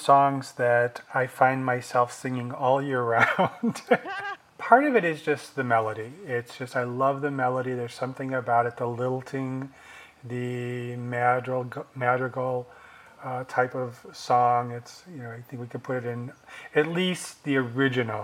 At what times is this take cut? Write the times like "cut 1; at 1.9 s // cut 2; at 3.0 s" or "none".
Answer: cut 1; at 4.1 s